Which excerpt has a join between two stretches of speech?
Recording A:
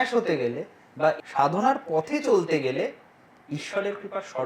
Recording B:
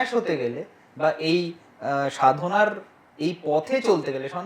A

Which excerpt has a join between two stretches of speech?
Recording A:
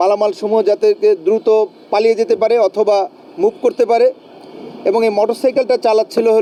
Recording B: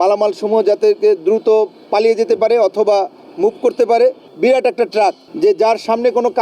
B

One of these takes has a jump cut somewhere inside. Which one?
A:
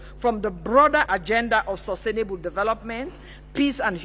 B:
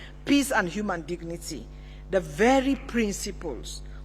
A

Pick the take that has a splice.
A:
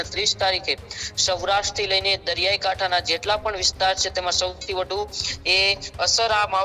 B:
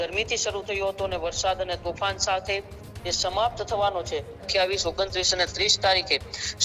B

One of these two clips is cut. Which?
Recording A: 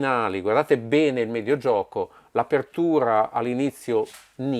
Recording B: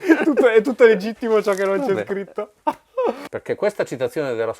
B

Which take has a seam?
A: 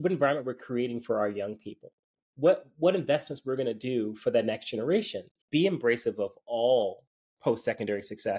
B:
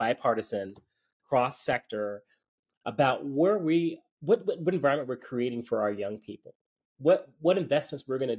A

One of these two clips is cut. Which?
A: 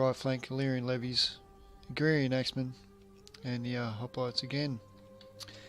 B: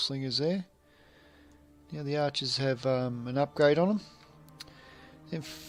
A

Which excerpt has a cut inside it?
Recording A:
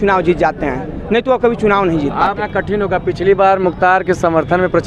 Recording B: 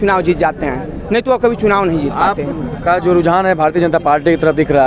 A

